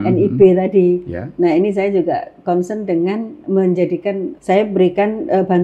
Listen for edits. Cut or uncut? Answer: cut